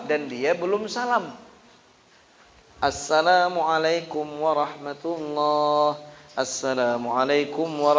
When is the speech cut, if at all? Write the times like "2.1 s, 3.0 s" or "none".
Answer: none